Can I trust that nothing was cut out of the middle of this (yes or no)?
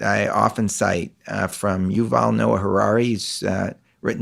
yes